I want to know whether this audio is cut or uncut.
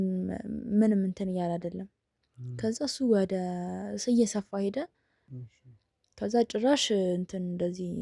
cut